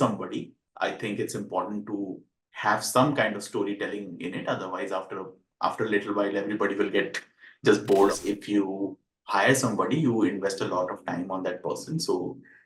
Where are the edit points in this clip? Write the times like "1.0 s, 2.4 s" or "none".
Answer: 8.1 s